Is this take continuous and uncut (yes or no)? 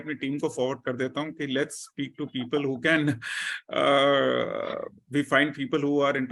yes